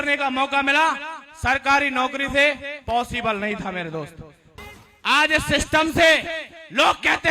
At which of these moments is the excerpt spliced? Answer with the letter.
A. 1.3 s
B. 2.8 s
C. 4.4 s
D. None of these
C